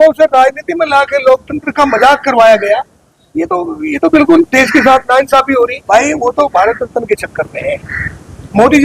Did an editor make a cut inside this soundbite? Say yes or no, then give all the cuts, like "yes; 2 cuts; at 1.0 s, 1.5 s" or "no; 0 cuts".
yes; 1 cut; at 5.8 s